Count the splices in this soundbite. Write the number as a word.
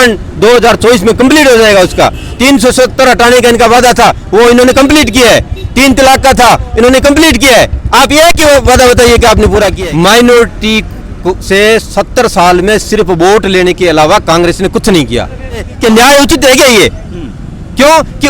two